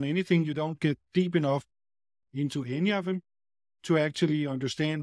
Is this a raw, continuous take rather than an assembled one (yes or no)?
yes